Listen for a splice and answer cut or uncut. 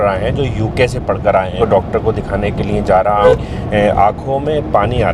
cut